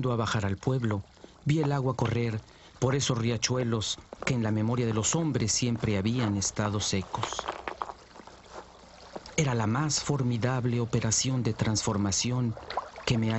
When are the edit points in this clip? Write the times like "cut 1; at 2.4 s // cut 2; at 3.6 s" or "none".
cut 1; at 11.2 s